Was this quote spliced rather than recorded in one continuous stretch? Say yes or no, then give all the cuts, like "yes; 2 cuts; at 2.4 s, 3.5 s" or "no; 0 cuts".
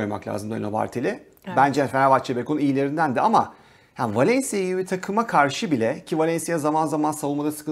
no; 0 cuts